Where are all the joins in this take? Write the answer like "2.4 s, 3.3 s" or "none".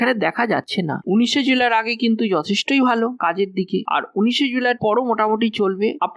1.0 s